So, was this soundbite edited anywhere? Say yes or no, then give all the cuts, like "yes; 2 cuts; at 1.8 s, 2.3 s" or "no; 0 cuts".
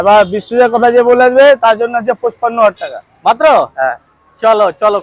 no; 0 cuts